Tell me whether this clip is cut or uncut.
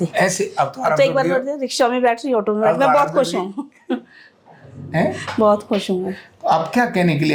uncut